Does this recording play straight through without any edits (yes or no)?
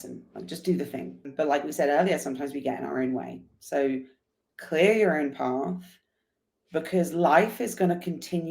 no